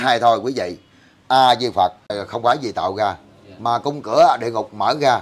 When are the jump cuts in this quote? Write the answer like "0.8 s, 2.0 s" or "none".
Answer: 2.2 s